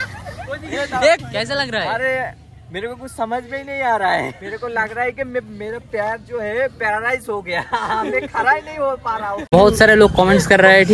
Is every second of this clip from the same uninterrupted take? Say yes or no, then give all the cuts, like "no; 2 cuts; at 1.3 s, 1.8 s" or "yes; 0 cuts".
no; 1 cut; at 9.5 s